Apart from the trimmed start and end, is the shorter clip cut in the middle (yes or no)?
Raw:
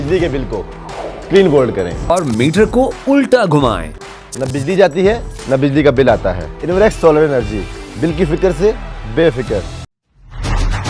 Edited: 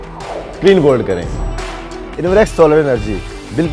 yes